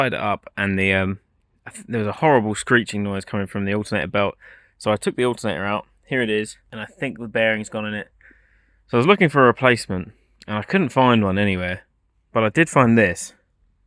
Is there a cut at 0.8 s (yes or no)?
no